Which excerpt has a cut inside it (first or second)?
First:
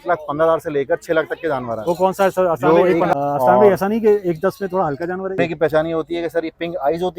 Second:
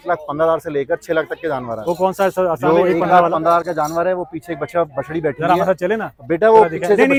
first